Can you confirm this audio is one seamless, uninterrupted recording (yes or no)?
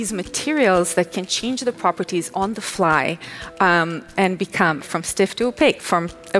no